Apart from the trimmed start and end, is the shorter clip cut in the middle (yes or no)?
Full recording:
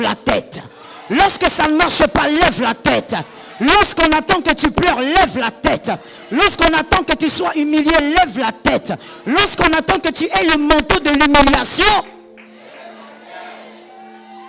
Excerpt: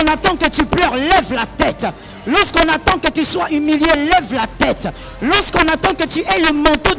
no